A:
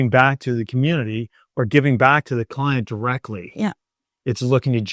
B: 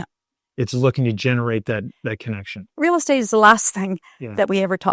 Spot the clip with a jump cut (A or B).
B